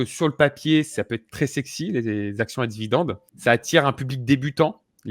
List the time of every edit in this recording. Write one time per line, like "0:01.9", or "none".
0:03.2